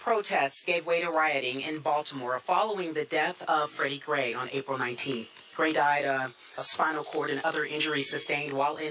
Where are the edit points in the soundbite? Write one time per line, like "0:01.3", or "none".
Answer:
none

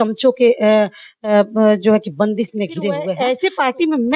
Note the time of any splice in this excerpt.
0:03.1

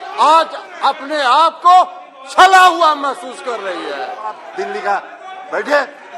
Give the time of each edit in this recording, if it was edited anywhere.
0:04.5

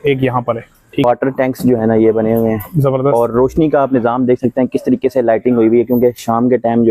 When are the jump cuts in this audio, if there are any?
0:01.0

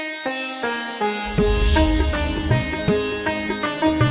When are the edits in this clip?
0:02.6

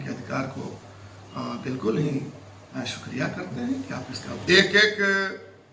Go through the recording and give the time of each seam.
0:04.3

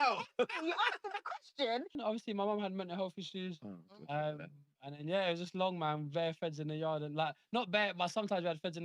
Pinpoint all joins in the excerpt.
0:02.0

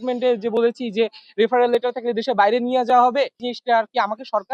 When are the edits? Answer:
0:03.4

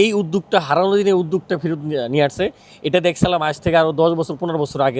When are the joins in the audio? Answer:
none

